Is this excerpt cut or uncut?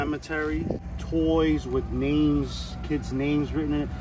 cut